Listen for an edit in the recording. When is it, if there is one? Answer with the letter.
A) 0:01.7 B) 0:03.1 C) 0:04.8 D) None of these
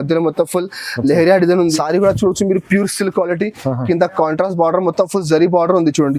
A